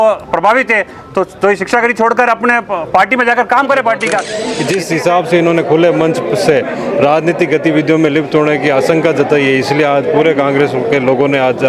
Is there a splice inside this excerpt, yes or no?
yes